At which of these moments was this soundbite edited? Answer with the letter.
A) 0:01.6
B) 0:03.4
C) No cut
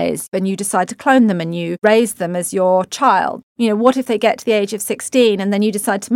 B